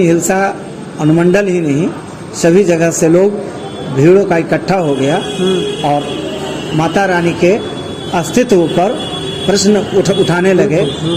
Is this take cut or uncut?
uncut